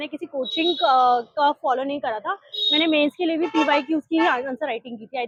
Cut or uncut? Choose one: uncut